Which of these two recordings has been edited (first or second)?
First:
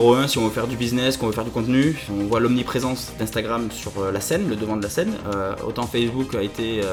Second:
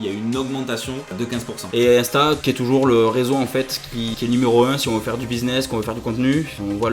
second